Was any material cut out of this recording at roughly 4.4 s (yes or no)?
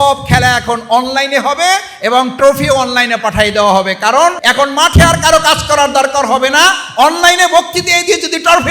yes